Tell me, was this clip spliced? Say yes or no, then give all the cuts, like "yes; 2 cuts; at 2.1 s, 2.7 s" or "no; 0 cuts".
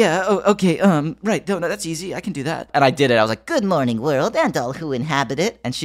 yes; 1 cut; at 2.7 s